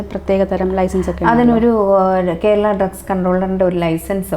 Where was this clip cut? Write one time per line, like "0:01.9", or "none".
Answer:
none